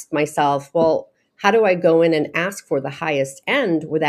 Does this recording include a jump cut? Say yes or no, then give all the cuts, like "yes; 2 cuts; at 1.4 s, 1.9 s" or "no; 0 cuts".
no; 0 cuts